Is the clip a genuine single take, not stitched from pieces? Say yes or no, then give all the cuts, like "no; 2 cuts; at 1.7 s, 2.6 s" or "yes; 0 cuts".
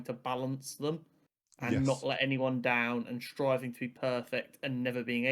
yes; 0 cuts